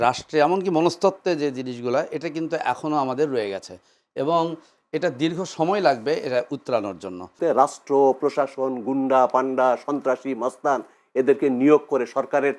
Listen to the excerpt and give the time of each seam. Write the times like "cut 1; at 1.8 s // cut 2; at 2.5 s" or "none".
cut 1; at 7.3 s